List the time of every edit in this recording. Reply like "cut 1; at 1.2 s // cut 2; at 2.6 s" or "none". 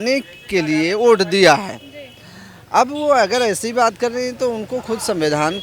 none

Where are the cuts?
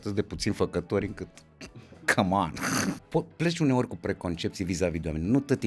cut 1; at 3.0 s

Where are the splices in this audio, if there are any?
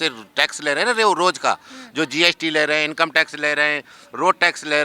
none

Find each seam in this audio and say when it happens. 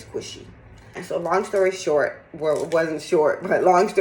cut 1; at 1.0 s

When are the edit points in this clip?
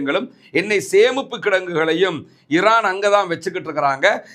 none

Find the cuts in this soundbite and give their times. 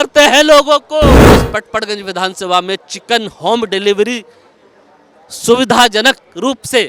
cut 1; at 1.2 s

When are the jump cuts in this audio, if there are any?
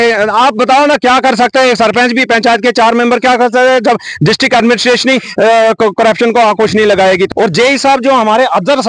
cut 1; at 7.3 s

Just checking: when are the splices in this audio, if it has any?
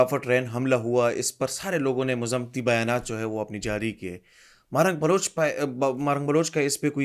none

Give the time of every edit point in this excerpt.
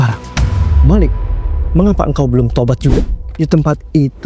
cut 1; at 3.2 s

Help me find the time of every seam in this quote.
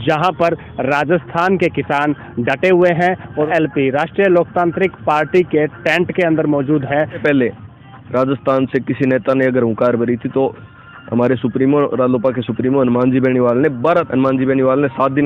cut 1; at 3.5 s // cut 2; at 7.2 s // cut 3; at 14.1 s

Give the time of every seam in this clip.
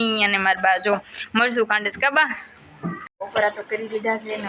cut 1; at 3.1 s

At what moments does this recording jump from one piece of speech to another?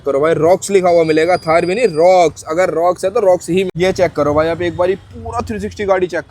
cut 1; at 3.7 s

